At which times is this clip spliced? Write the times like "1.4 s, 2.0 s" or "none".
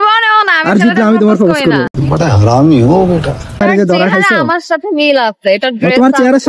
2.0 s, 3.6 s